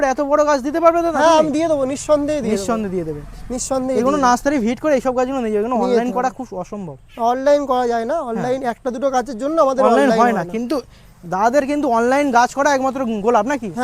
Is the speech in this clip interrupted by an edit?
no; 0 cuts

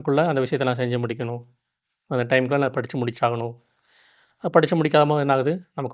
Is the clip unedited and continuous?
yes; 0 cuts

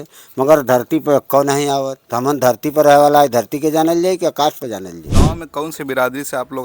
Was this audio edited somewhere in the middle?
yes; 2 cuts; at 2.0 s, 5.0 s

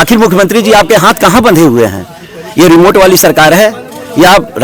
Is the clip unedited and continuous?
yes; 0 cuts

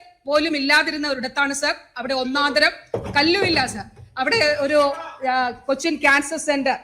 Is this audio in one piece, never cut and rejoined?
yes; 0 cuts

